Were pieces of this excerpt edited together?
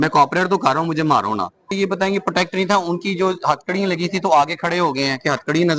yes; 1 cut; at 1.7 s

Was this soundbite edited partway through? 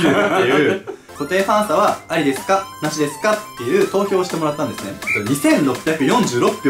yes; 1 cut; at 1.0 s

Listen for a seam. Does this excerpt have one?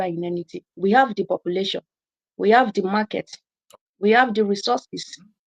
no; 0 cuts

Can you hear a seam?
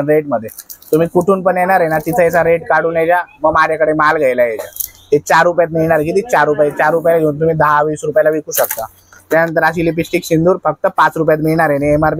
no; 0 cuts

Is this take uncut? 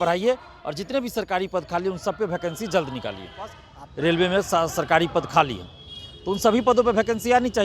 no; 1 cut; at 3.6 s

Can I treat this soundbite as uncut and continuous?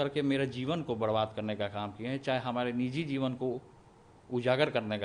yes; 0 cuts

